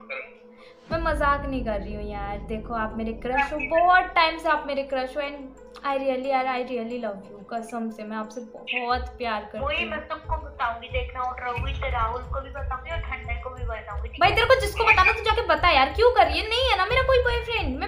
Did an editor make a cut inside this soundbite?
no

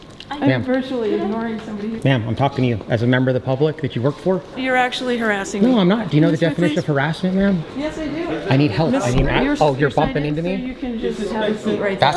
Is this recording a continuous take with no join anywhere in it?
no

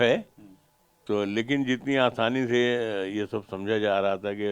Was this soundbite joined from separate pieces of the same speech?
no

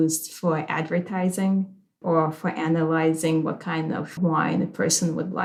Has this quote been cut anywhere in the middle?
no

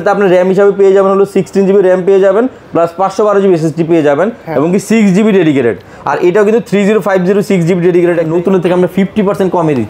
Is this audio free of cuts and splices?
no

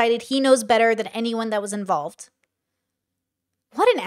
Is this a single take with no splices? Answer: yes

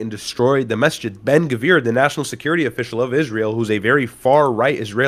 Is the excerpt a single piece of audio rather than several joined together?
yes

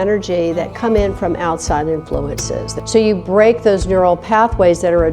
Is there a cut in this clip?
yes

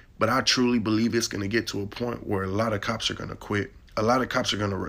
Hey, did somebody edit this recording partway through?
yes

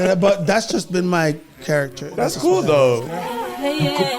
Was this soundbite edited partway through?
yes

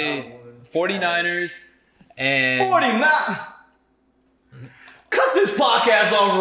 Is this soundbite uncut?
yes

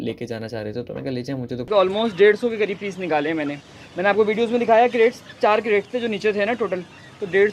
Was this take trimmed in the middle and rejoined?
yes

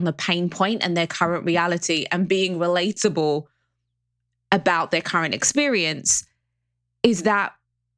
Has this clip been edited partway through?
no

